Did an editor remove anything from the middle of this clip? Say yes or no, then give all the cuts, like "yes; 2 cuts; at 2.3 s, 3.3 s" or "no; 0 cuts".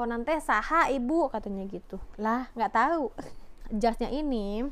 yes; 1 cut; at 3.6 s